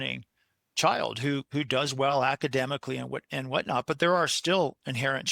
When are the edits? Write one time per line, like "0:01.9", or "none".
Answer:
none